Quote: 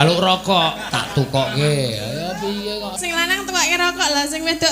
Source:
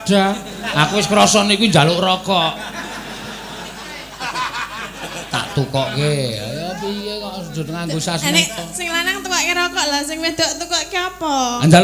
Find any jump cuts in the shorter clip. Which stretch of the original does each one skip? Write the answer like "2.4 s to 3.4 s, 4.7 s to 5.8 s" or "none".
2.6 s to 5.2 s, 7.4 s to 8.7 s